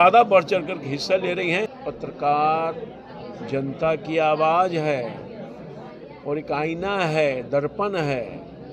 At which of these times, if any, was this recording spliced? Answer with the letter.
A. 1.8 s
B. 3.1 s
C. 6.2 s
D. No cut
A